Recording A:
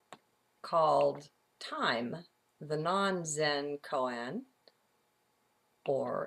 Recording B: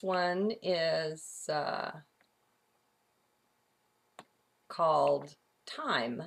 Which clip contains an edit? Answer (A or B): A